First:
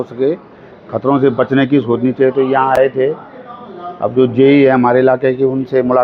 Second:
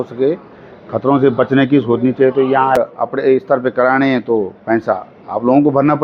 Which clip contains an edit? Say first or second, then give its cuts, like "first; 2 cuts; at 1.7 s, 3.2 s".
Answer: second; 1 cut; at 2.8 s